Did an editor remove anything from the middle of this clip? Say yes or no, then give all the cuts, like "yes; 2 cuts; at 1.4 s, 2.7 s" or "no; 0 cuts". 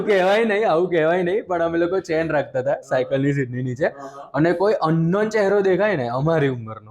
no; 0 cuts